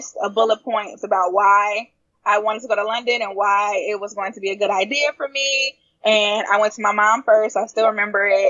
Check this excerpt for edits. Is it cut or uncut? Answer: uncut